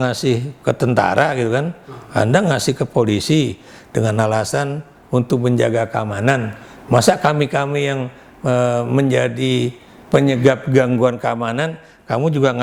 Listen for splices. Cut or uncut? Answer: uncut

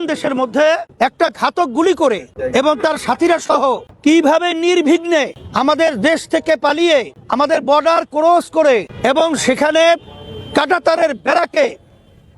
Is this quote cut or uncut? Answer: cut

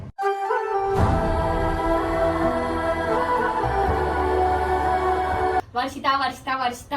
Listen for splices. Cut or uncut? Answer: cut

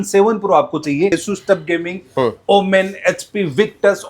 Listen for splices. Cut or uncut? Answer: cut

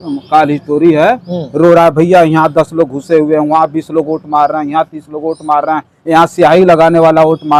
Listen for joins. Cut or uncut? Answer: uncut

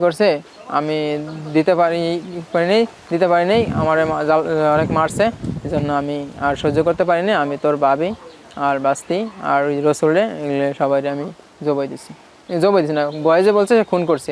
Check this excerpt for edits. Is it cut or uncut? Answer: uncut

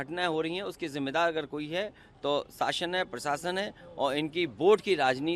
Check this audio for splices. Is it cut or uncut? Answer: uncut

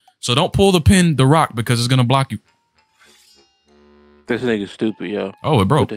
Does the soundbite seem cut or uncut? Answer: uncut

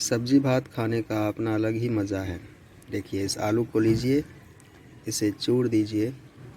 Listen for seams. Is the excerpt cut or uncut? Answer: uncut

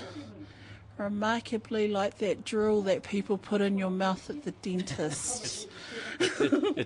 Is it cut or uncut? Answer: uncut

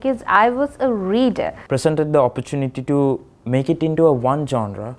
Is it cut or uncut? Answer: cut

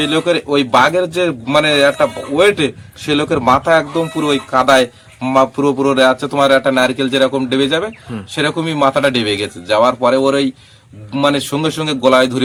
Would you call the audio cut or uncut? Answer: uncut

